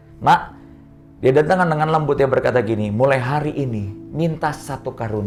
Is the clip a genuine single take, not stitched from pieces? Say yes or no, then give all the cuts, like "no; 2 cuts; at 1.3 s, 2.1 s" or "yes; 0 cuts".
yes; 0 cuts